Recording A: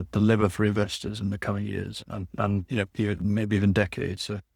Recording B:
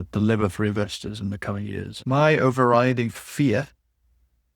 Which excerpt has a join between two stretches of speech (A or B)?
B